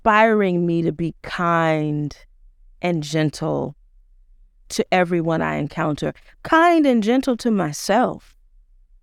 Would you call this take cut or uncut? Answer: uncut